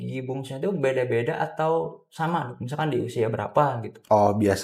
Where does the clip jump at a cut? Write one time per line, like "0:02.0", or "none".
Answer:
none

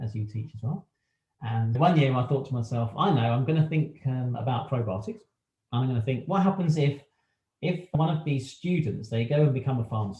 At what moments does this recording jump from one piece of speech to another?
0:01.6

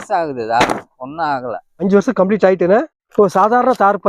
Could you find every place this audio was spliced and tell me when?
0:01.8
0:03.0

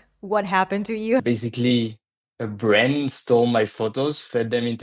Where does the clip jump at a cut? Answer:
0:01.2

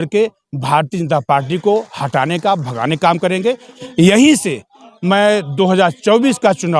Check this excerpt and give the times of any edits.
0:03.8

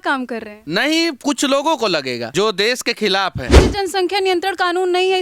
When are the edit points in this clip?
0:02.2
0:03.5

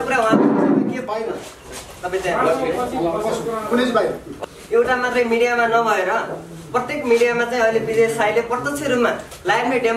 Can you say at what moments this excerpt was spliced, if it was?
0:04.3

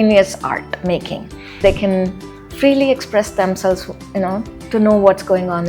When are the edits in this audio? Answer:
0:01.6

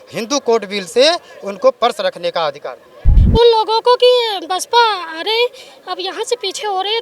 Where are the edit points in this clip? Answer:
0:03.1

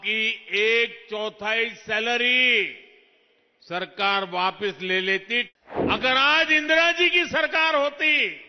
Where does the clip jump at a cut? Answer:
0:05.5

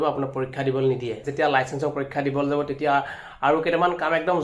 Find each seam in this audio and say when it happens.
0:01.3

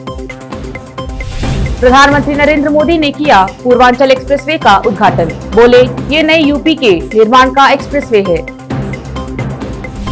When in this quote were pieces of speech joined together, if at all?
0:01.0

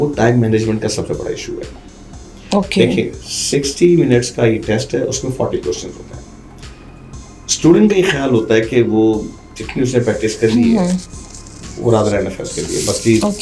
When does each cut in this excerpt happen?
none

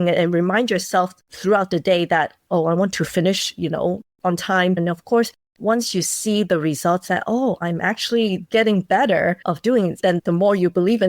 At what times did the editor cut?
0:04.8
0:10.1

